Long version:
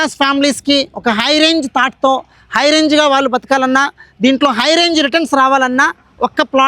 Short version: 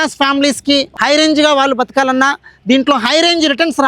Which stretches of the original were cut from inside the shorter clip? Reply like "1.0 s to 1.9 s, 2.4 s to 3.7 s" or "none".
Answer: 0.9 s to 2.5 s